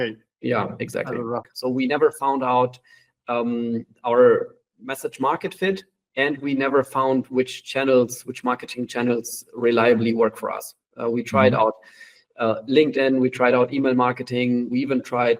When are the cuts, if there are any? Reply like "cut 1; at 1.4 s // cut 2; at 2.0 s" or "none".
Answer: cut 1; at 1.5 s